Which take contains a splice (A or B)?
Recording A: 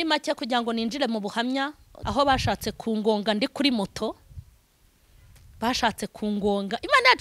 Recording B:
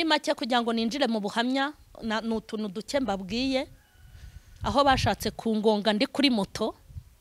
A